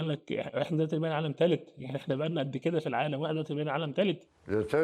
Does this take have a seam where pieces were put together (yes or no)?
no